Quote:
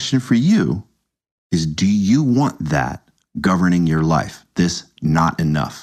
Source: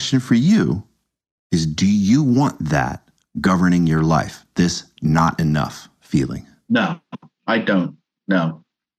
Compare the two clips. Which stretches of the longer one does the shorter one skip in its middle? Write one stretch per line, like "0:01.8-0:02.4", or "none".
none